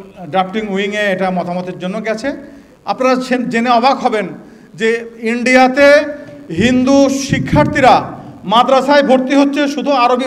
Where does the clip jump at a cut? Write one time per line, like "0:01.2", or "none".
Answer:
0:03.0